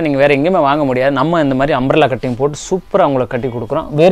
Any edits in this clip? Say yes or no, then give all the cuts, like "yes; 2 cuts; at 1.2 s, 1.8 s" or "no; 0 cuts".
no; 0 cuts